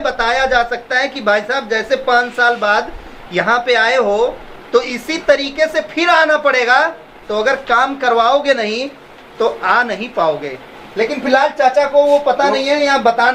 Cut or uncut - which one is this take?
uncut